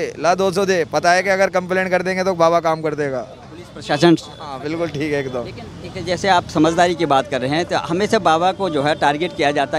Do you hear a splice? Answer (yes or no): no